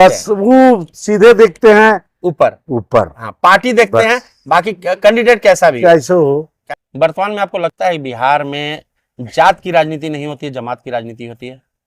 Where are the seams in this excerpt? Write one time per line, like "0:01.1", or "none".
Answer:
0:06.5